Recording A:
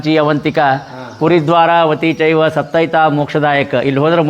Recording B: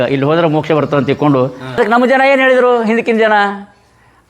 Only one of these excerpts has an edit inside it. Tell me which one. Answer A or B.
B